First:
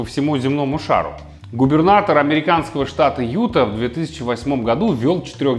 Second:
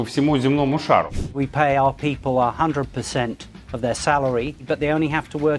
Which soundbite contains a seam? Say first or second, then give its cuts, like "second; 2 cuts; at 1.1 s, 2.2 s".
second; 2 cuts; at 1.2 s, 4.6 s